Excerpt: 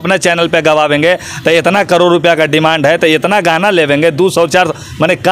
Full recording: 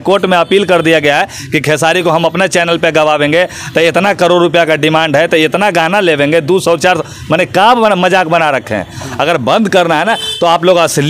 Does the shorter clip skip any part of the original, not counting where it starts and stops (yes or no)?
no